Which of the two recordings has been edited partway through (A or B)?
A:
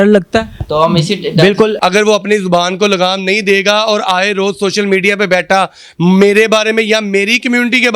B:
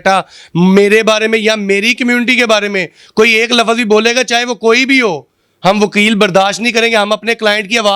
A